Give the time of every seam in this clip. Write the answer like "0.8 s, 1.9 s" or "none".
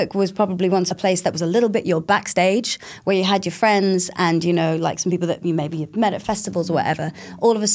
0.9 s